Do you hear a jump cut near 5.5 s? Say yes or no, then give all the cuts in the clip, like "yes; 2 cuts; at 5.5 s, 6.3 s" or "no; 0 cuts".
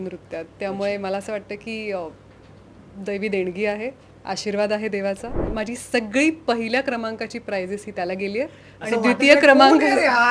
yes; 1 cut; at 5.5 s